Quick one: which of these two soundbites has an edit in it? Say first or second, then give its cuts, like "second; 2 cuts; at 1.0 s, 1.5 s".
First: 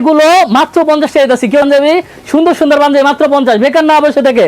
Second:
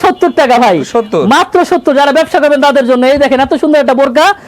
first; 1 cut; at 1.6 s